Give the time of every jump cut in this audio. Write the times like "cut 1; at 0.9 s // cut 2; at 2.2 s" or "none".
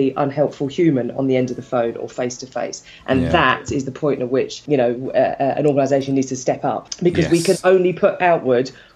cut 1; at 4.6 s // cut 2; at 6.9 s